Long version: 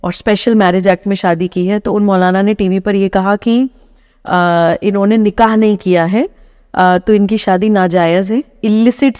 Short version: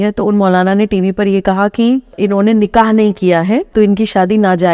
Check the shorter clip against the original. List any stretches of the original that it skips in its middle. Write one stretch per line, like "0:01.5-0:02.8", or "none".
0:03.8-0:04.8
0:06.3-0:07.0